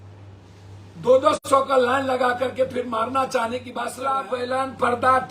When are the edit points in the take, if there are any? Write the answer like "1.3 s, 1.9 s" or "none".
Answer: 4.0 s